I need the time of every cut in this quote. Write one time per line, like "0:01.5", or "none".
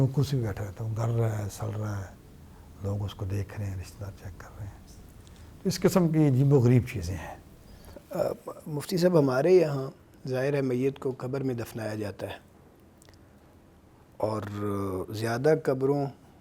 none